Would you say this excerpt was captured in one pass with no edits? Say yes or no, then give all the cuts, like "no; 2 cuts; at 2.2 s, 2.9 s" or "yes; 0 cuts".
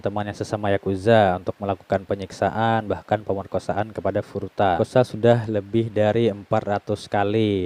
no; 1 cut; at 4.8 s